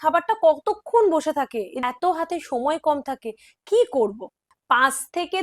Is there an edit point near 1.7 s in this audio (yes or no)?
yes